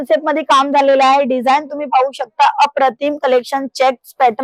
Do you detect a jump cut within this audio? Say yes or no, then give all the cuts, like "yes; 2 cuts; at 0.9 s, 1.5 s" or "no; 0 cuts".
no; 0 cuts